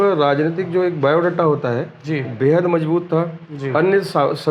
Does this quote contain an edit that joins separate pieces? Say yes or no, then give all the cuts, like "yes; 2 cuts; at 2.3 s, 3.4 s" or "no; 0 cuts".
no; 0 cuts